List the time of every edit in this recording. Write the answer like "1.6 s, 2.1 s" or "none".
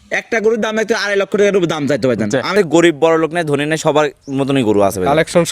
2.5 s